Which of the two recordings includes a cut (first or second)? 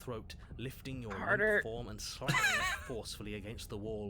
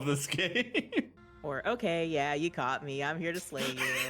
second